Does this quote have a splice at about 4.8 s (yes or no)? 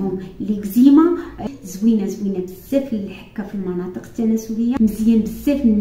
yes